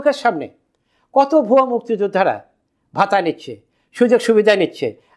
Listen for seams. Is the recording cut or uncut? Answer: uncut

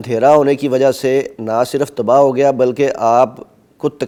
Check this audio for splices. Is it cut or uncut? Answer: uncut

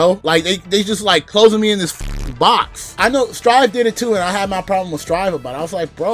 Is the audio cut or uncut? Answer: cut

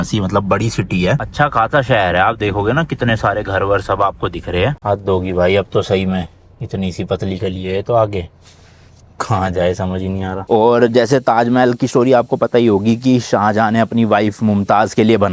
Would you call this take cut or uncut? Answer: cut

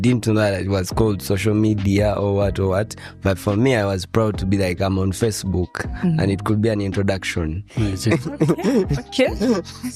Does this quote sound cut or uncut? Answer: uncut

